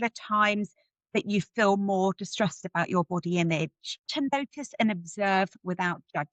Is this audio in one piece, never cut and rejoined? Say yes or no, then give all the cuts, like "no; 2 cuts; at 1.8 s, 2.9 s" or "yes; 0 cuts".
no; 1 cut; at 4.0 s